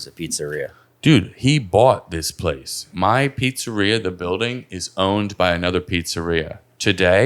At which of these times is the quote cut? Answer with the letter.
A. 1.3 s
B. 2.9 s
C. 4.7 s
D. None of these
B